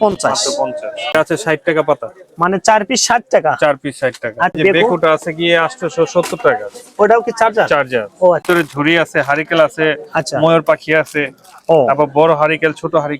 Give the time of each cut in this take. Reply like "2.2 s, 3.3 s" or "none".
1.1 s, 4.6 s, 8.4 s